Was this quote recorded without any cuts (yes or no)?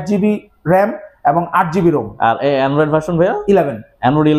yes